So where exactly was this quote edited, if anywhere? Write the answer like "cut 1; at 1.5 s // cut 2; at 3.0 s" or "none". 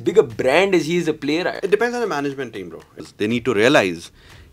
cut 1; at 1.6 s // cut 2; at 3.0 s